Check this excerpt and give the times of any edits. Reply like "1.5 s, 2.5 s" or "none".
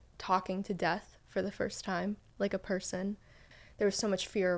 3.4 s